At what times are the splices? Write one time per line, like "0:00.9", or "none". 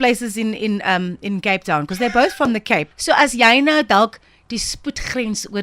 0:02.9